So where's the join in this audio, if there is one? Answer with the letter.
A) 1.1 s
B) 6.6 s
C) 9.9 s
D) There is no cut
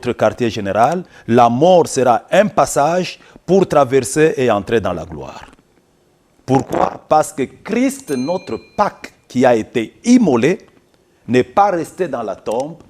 A